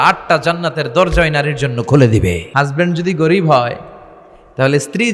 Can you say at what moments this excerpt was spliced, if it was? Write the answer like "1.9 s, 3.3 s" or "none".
2.4 s